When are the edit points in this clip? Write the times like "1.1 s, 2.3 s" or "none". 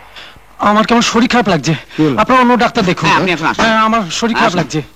none